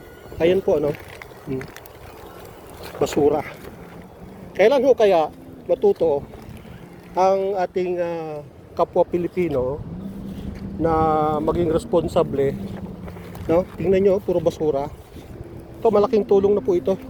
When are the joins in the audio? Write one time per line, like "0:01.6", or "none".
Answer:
none